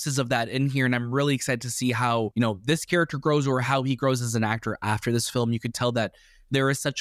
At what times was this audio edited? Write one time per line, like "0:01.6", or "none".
0:02.3

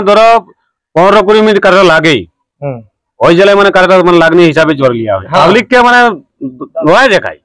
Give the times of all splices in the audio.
0:05.2

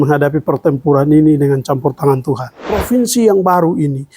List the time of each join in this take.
0:02.7

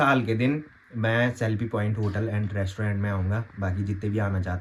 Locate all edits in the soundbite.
none

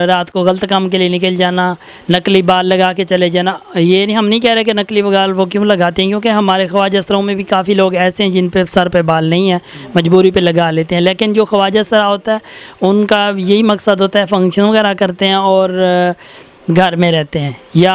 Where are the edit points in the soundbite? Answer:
none

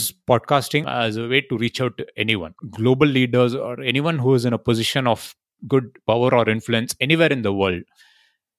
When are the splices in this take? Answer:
0:00.8
0:02.5

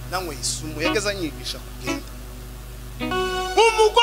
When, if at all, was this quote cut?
0:03.1

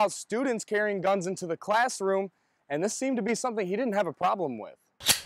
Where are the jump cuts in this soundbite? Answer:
none

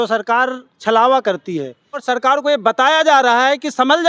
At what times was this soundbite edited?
0:02.0

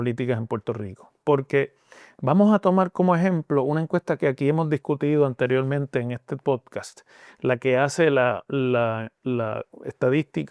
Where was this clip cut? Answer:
none

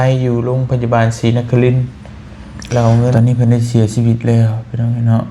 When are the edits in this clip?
0:03.1

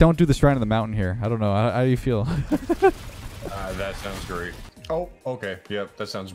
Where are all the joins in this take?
0:04.7

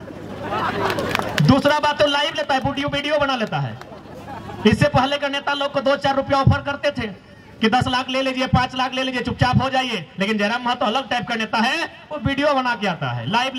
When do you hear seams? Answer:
none

